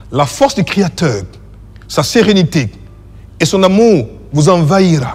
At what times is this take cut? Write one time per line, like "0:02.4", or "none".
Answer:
none